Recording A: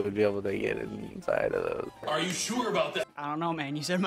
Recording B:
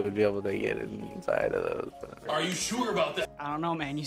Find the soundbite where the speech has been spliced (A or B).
A